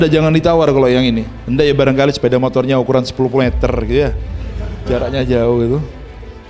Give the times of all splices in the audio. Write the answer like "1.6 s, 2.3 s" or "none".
1.4 s